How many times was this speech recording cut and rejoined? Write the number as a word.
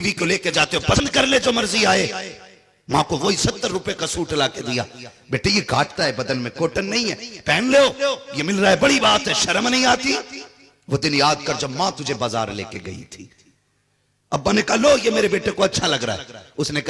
one